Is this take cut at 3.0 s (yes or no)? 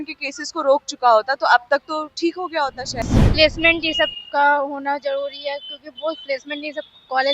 yes